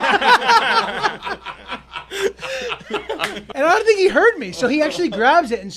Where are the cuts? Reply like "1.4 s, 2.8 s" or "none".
3.4 s